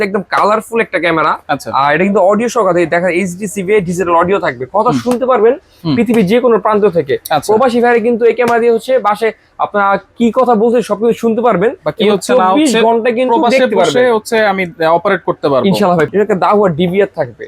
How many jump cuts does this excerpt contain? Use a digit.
1